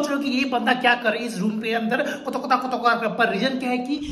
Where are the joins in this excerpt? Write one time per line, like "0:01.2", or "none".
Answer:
none